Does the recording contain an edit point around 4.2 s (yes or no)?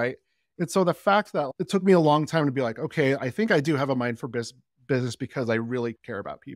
no